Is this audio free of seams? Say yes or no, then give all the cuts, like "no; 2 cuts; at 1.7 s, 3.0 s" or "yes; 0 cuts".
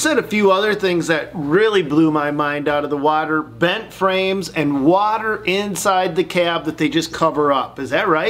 yes; 0 cuts